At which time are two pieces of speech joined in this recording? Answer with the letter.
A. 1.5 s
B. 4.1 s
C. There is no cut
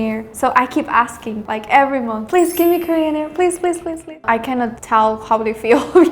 B